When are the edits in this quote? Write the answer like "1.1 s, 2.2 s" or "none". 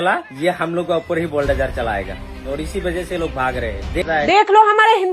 4.0 s